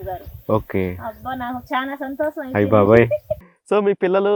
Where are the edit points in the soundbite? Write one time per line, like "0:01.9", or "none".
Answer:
0:03.4